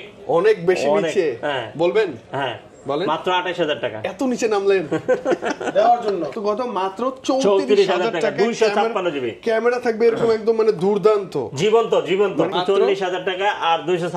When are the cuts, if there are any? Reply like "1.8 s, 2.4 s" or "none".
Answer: 6.4 s, 12.5 s